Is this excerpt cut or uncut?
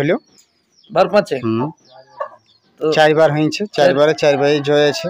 uncut